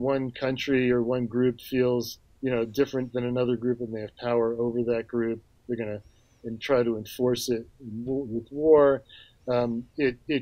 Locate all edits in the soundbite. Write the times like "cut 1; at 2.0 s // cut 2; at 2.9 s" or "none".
none